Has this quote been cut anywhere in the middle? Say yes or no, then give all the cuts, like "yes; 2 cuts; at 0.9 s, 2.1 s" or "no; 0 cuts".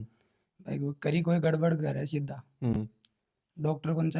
no; 0 cuts